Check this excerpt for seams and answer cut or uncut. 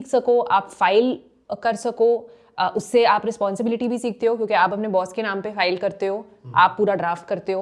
uncut